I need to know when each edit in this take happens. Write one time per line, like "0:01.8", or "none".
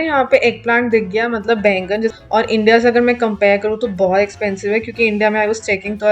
0:02.2